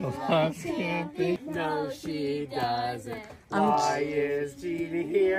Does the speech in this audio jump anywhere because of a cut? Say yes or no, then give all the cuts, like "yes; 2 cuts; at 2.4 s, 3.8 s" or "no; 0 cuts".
yes; 1 cut; at 1.4 s